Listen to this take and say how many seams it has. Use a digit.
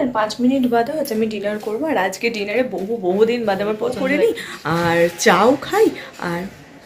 1